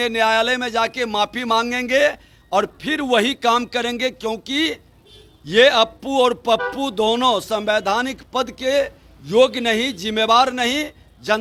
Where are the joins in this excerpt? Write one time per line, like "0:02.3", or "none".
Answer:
none